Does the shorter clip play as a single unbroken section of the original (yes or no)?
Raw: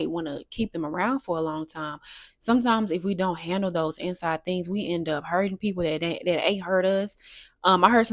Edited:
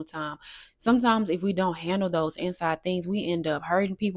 yes